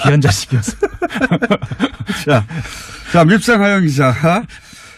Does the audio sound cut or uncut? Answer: uncut